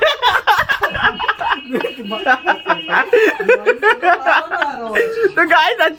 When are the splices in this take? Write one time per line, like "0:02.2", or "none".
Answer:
none